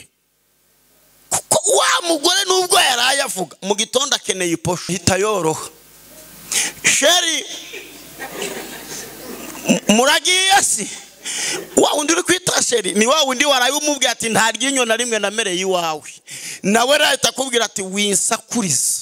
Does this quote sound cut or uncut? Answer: cut